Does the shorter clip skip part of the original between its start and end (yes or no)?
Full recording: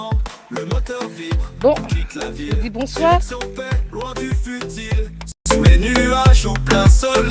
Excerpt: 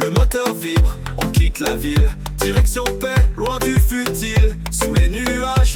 yes